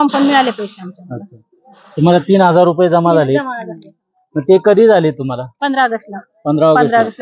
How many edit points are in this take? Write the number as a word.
zero